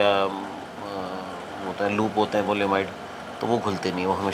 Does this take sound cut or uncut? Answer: uncut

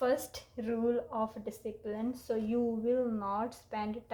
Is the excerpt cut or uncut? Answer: uncut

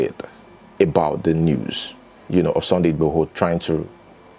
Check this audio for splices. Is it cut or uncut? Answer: uncut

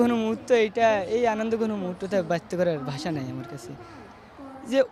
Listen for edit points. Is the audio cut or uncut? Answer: uncut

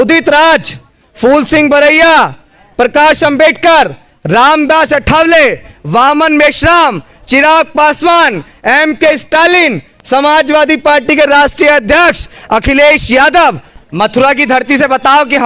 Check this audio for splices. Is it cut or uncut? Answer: cut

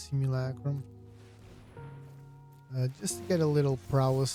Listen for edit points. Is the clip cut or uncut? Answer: uncut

